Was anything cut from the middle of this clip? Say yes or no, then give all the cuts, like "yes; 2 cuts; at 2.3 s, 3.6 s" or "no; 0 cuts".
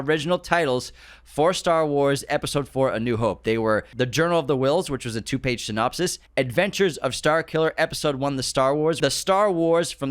yes; 3 cuts; at 3.9 s, 6.2 s, 9.0 s